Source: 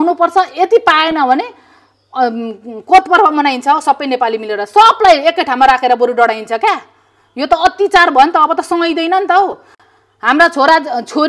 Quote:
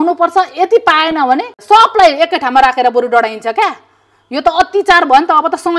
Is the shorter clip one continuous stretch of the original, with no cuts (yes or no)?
no